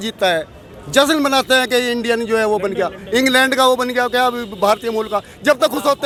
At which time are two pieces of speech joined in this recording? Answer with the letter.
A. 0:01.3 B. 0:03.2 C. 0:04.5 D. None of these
D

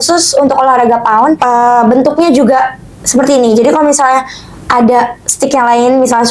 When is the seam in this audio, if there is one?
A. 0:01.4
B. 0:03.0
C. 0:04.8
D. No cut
A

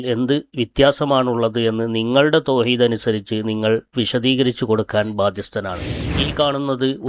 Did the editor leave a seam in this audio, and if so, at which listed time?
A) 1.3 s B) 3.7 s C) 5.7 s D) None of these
C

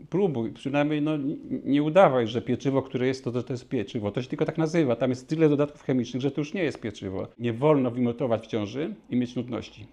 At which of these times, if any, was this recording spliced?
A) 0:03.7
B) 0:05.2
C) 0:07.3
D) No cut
C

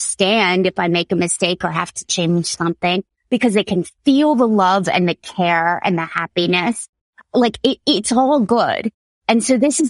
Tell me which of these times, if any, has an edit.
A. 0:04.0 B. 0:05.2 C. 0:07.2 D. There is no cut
C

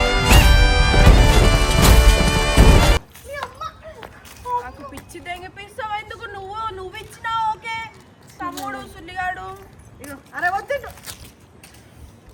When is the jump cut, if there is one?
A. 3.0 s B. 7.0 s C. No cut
C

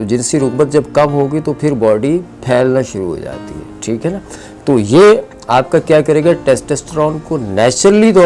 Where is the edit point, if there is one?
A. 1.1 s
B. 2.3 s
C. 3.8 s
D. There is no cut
D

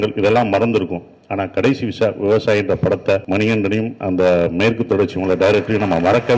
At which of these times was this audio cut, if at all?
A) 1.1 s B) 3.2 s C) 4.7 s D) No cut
B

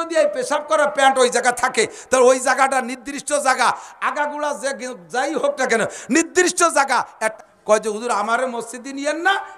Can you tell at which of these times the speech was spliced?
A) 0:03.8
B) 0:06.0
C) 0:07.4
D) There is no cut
C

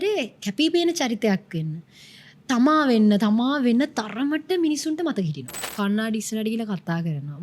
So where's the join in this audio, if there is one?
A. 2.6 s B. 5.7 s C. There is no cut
B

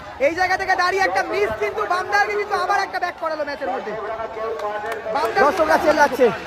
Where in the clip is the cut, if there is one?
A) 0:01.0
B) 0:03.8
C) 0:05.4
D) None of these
C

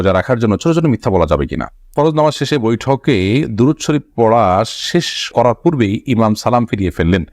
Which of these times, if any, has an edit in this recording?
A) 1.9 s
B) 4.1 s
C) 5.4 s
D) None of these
A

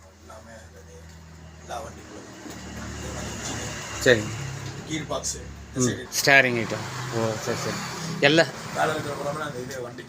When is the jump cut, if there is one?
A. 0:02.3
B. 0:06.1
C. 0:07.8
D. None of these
B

